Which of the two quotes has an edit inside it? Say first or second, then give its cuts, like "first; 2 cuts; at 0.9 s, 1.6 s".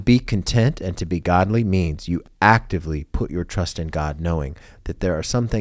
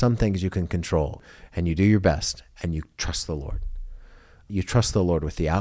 second; 2 cuts; at 1.3 s, 4.5 s